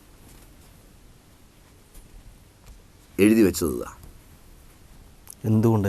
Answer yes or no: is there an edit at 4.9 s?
yes